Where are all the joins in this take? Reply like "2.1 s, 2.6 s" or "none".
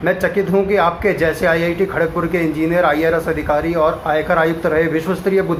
none